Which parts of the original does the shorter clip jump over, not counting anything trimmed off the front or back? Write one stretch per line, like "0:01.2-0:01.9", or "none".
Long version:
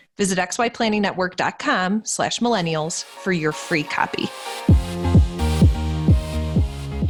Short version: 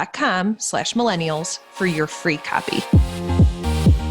0:04.3-0:04.6

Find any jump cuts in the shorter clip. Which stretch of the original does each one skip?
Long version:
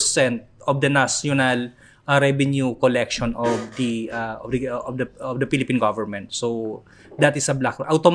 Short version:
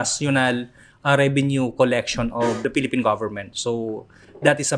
0:03.6-0:05.4

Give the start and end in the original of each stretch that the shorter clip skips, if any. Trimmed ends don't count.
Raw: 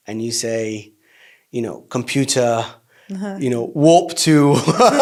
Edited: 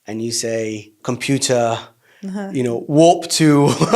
0:00.9-0:01.8

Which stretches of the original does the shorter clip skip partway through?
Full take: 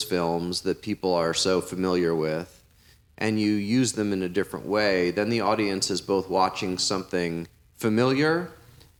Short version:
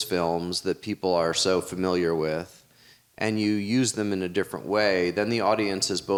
none

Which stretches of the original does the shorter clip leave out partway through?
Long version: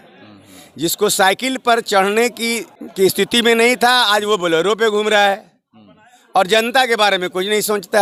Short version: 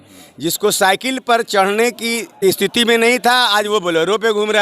0:02.6-0:02.8

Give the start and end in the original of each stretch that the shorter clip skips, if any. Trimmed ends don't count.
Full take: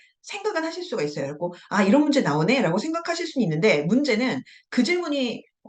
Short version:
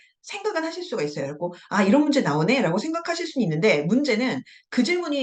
none

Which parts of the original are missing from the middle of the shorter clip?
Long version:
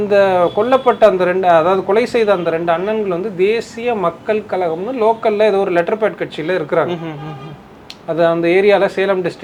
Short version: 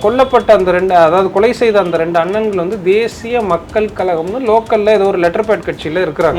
none

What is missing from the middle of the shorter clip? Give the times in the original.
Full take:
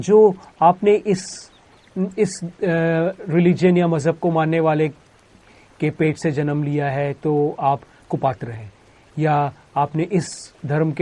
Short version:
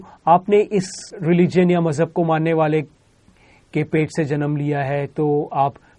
0:01.5-0:03.2

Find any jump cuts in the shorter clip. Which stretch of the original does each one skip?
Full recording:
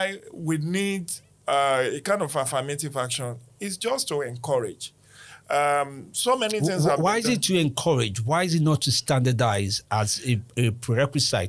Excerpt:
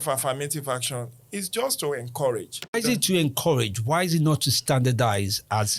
0:05.0-0:07.1

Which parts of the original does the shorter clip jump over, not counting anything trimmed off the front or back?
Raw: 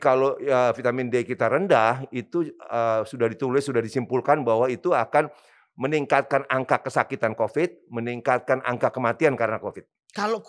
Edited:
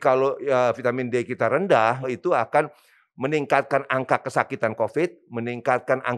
0:02.1-0:04.7

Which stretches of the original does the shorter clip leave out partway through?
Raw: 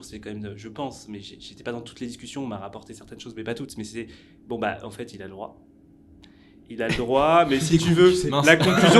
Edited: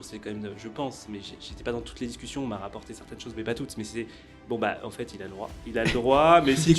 0:05.6-0:06.6

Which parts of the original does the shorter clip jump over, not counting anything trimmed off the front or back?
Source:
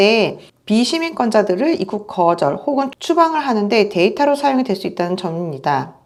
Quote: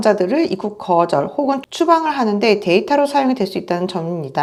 none

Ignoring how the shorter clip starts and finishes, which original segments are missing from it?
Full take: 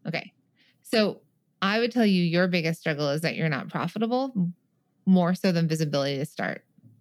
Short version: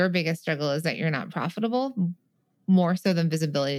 none

